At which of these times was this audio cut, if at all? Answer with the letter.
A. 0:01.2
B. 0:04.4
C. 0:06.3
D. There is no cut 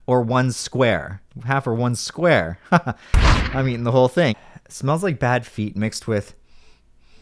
B